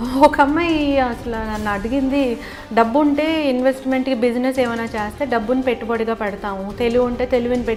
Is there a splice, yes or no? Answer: no